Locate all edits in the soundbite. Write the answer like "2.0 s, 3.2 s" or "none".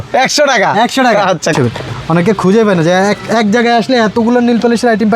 1.5 s